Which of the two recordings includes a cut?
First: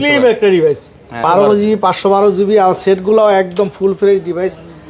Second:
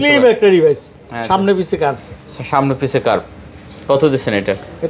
first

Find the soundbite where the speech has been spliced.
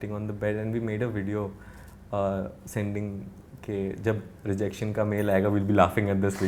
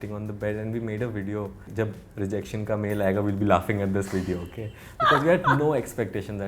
second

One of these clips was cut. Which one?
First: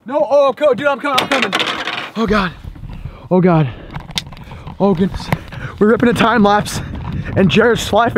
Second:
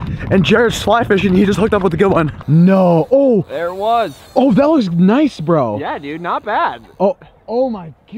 second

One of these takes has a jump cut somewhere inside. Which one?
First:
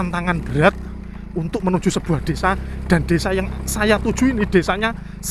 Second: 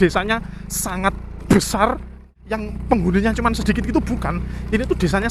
second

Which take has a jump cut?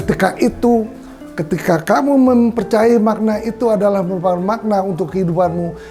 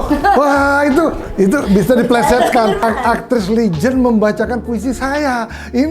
second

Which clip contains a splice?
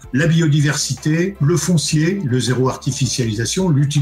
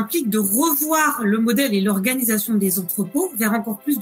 first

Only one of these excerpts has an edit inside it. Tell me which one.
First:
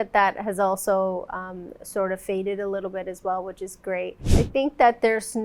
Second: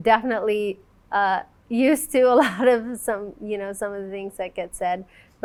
first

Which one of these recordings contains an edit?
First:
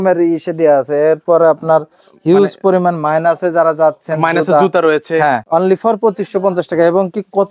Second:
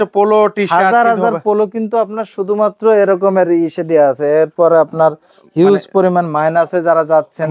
first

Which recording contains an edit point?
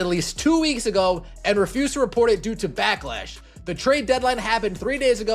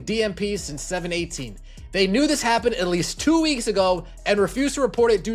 first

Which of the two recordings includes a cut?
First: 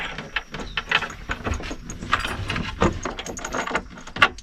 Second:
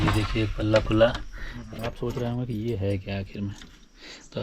second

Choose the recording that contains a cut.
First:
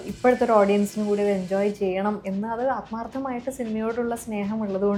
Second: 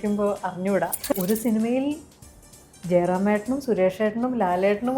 second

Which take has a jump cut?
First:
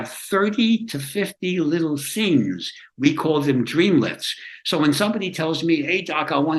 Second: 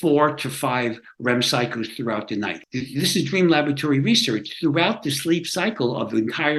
second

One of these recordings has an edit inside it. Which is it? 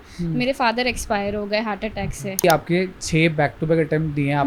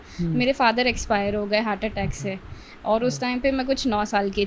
first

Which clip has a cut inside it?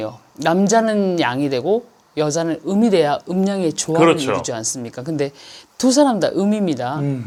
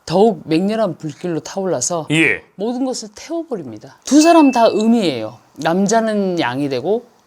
second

